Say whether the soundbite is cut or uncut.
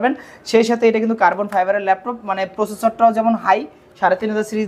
uncut